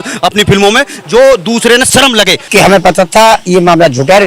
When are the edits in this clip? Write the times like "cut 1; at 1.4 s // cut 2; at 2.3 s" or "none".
cut 1; at 2.4 s